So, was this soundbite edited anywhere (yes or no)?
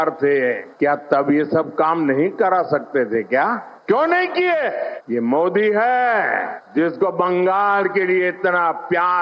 no